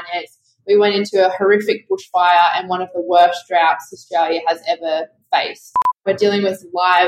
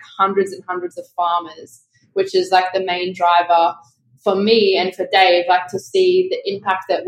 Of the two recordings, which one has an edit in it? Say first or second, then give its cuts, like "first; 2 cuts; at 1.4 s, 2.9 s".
first; 1 cut; at 6.0 s